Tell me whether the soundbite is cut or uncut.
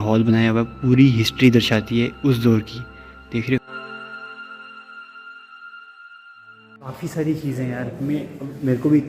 uncut